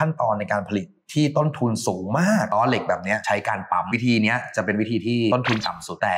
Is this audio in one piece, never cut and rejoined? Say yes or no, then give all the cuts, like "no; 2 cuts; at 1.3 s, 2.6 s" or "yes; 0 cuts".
no; 3 cuts; at 2.5 s, 3.9 s, 5.3 s